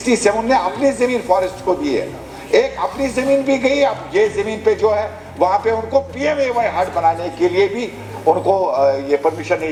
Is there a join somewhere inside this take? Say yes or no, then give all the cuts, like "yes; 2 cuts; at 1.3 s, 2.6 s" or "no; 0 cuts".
no; 0 cuts